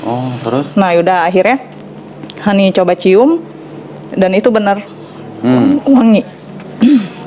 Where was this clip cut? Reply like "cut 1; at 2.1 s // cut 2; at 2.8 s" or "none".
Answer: none